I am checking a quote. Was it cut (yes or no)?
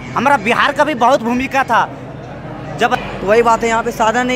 yes